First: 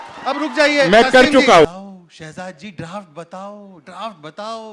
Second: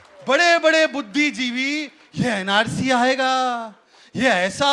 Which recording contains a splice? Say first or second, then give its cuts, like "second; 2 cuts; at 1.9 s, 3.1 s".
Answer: first; 1 cut; at 1.7 s